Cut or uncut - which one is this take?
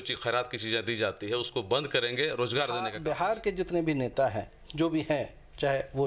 cut